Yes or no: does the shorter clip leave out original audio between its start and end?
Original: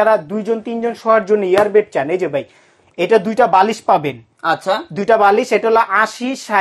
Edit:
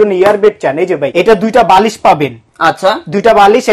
yes